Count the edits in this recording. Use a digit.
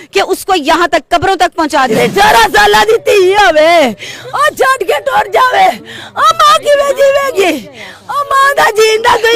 1